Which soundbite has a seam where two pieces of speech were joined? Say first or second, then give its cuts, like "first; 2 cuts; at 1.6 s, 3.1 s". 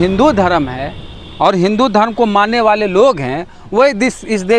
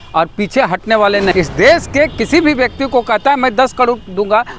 second; 1 cut; at 1.3 s